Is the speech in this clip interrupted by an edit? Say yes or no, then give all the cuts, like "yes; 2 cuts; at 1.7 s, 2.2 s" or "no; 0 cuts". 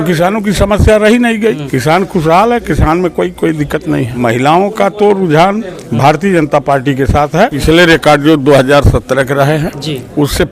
yes; 3 cuts; at 1.7 s, 4.1 s, 7.6 s